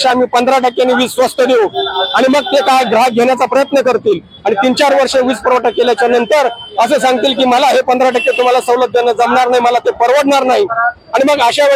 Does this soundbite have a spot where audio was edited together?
no; 0 cuts

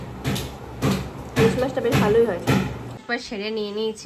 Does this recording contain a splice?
yes; 1 cut; at 2.8 s

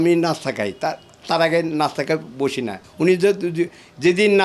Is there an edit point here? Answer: yes; 1 cut; at 2.8 s

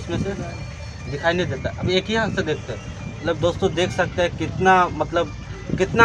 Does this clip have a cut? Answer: no; 0 cuts

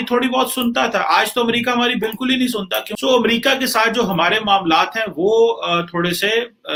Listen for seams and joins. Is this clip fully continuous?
yes; 0 cuts

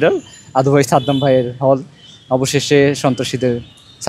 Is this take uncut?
yes; 0 cuts

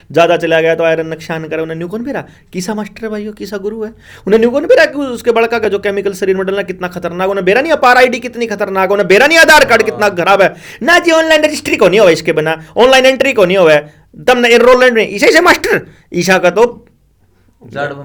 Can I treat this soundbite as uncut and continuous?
yes; 0 cuts

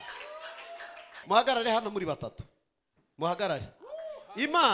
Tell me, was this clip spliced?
yes; 1 cut; at 1.2 s

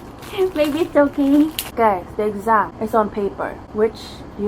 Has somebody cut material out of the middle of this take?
yes; 2 cuts; at 1.6 s, 3.1 s

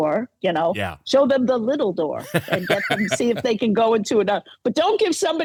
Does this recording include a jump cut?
no; 0 cuts

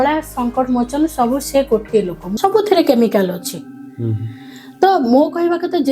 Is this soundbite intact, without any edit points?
no; 1 cut; at 2.2 s

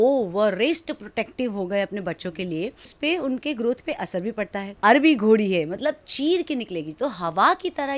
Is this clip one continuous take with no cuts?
no; 2 cuts; at 2.9 s, 4.6 s

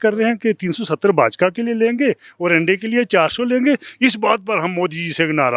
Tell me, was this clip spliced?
no; 0 cuts

